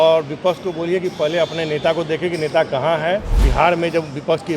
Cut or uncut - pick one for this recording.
cut